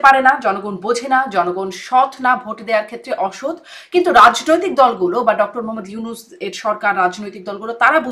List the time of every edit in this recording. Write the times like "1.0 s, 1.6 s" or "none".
none

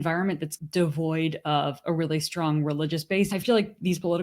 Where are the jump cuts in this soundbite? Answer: 3.3 s

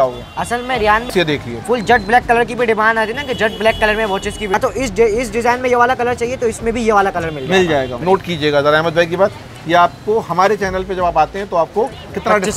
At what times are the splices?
1.1 s, 4.5 s, 7.9 s

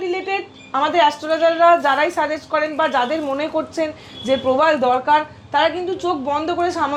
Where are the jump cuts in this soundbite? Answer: none

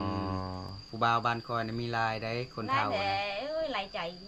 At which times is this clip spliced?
none

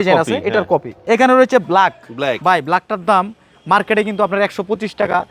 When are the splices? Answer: 0.9 s

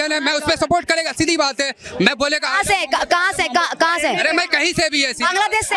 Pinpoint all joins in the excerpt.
none

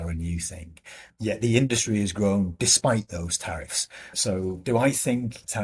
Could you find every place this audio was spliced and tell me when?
1.0 s

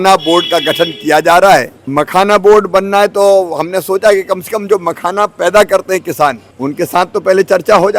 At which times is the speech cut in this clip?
1.8 s, 6.5 s

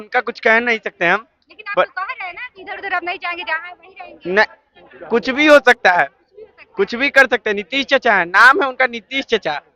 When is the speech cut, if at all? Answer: none

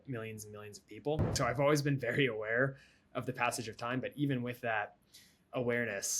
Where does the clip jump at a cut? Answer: 1.3 s

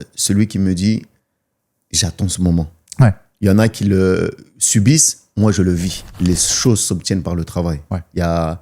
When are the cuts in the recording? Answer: 6.0 s

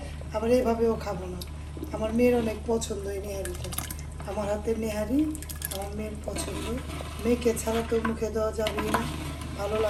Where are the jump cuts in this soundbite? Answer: none

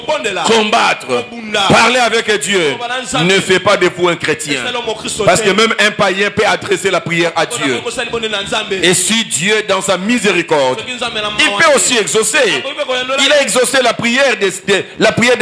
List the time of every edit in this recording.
none

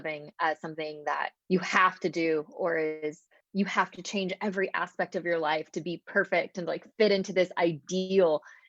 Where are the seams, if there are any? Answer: 1.4 s, 3.3 s

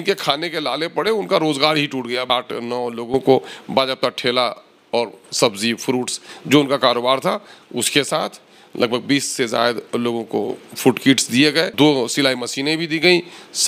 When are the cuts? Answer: 2.2 s, 11.7 s

